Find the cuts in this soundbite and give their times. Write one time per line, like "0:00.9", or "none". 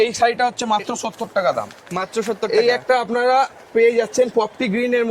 none